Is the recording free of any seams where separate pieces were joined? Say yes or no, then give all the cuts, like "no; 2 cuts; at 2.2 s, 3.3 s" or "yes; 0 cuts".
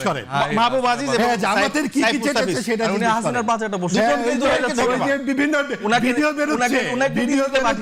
yes; 0 cuts